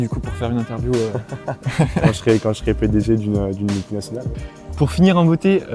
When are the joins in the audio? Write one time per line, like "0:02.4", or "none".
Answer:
0:04.4